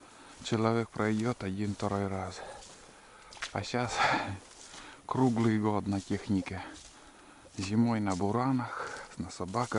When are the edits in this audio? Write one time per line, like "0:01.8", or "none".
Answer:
none